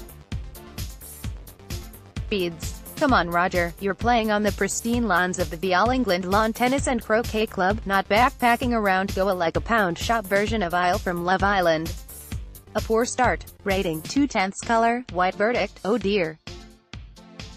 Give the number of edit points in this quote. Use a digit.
2